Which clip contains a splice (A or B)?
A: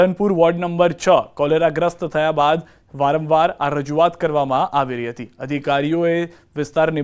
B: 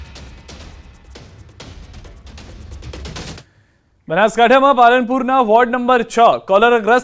B